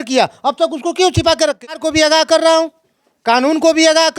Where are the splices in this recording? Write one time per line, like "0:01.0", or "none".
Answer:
0:01.6